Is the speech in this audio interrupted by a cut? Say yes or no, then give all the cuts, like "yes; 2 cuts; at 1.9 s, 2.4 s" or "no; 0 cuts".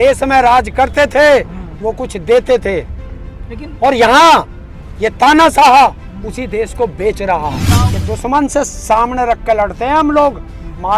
yes; 1 cut; at 7.6 s